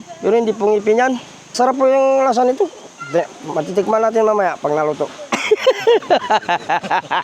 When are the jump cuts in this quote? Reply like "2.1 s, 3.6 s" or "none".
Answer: 1.5 s